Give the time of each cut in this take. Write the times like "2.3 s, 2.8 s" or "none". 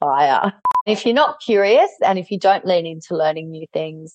0.9 s, 1.9 s